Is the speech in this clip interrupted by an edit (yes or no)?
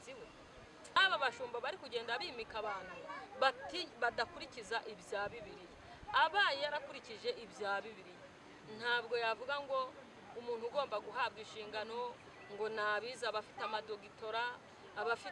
yes